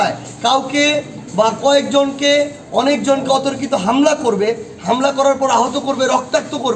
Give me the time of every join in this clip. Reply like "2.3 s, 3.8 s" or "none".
none